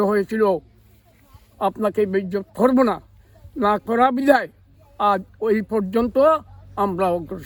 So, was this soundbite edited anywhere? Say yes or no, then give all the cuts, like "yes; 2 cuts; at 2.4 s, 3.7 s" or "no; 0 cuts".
no; 0 cuts